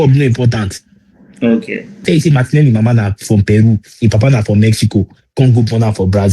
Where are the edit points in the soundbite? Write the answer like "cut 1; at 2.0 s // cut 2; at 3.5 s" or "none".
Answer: cut 1; at 2.0 s